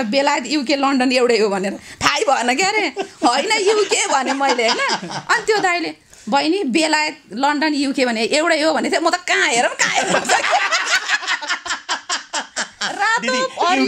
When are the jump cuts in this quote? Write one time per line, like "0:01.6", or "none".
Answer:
none